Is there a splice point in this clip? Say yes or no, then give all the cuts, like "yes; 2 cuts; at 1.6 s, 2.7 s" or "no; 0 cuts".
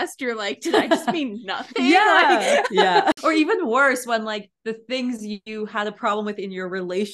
yes; 1 cut; at 3.1 s